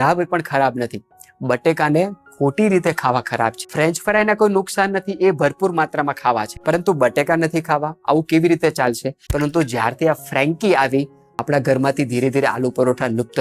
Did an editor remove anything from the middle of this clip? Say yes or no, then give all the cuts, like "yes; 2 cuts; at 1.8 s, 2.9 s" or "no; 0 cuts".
yes; 3 cuts; at 3.6 s, 6.5 s, 9.2 s